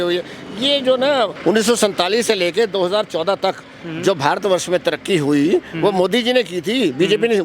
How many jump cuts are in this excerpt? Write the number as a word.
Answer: one